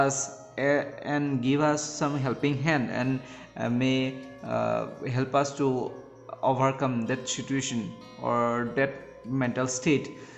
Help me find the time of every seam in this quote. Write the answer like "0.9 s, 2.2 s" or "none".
none